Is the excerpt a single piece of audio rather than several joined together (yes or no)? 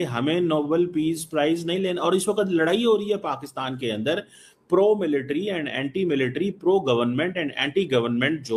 yes